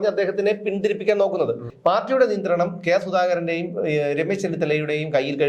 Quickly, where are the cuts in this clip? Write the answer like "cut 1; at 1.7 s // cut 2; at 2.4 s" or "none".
cut 1; at 1.7 s